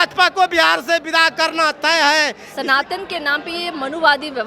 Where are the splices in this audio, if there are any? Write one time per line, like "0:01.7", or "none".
0:02.5